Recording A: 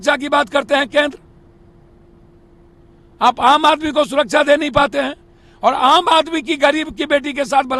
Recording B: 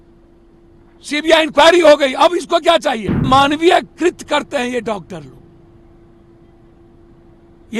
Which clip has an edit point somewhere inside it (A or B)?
B